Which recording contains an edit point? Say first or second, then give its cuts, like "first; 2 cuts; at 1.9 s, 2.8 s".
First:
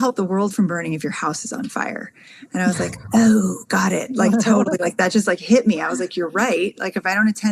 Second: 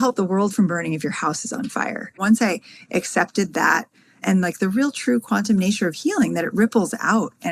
second; 1 cut; at 2.2 s